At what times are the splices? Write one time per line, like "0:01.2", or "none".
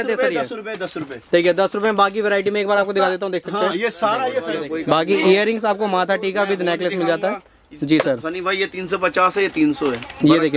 0:04.6